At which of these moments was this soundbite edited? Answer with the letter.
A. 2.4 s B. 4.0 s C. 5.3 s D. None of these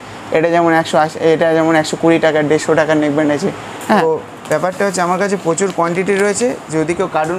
B